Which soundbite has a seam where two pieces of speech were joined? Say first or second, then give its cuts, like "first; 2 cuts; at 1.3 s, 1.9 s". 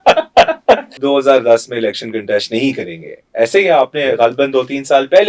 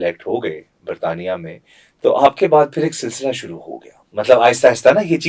first; 1 cut; at 1.0 s